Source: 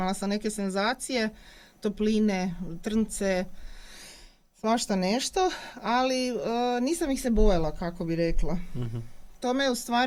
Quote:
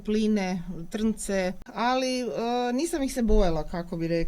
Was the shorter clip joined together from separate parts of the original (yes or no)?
yes